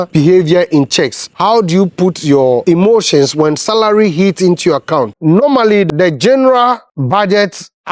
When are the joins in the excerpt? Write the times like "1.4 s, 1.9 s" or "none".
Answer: 5.1 s, 5.9 s